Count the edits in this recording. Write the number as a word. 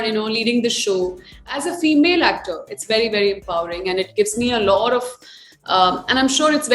one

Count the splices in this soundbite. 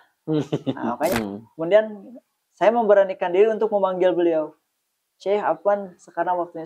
one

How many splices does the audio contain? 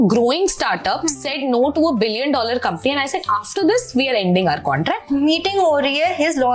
one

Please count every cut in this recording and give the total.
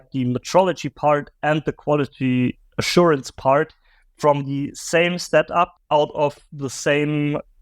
one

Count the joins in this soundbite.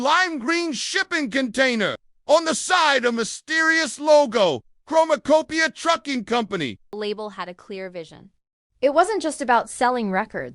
one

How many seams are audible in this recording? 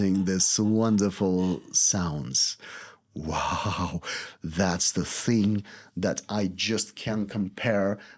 zero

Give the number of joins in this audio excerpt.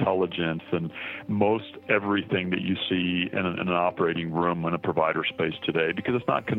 zero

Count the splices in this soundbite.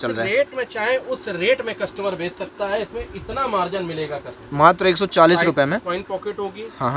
one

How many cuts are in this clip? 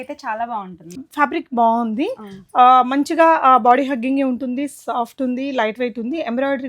one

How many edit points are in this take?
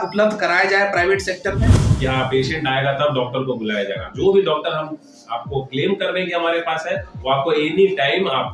one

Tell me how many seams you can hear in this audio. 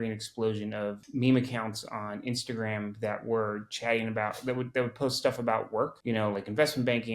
two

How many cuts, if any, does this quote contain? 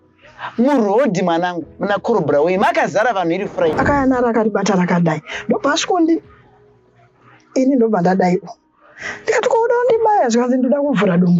one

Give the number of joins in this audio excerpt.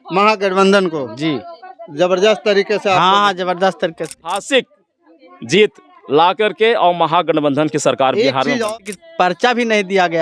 two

